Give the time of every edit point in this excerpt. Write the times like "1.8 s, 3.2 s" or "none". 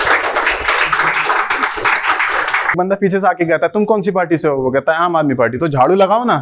2.7 s